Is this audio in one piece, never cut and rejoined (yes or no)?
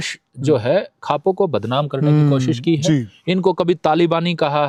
yes